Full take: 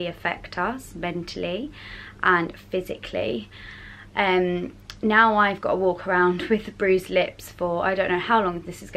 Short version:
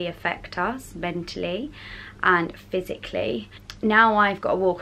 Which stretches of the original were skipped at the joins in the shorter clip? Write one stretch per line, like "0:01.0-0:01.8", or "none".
0:03.6-0:04.8